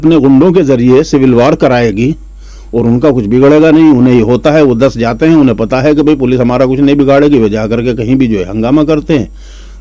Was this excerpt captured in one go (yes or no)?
yes